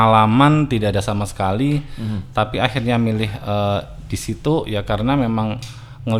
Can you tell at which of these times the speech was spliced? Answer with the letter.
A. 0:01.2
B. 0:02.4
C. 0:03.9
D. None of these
D